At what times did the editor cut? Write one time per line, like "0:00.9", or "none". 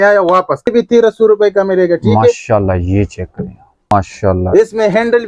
0:00.7
0:03.9